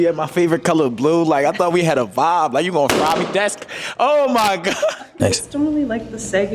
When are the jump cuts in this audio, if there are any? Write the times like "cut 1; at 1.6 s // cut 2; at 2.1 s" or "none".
cut 1; at 5.1 s